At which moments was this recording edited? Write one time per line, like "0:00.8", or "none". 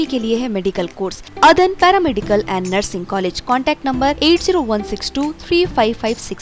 0:01.3